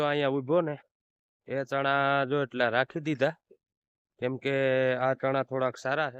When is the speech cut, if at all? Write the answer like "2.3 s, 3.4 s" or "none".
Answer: none